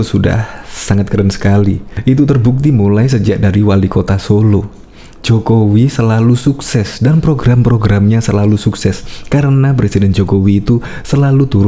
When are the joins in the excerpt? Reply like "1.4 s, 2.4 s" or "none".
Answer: 1.9 s